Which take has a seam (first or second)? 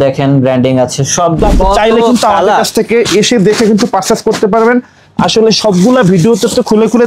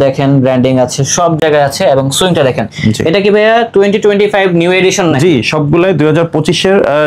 first